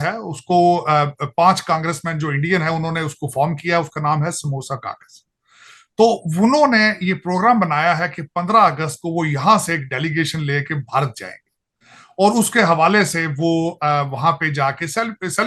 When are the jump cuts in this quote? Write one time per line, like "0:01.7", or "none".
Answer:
none